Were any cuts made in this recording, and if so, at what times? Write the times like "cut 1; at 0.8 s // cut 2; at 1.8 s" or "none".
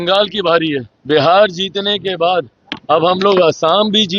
cut 1; at 0.9 s